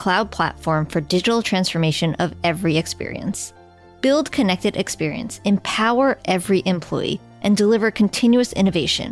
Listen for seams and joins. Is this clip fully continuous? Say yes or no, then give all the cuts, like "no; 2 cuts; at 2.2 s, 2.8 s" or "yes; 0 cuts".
yes; 0 cuts